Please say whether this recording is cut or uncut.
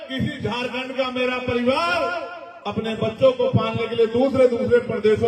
uncut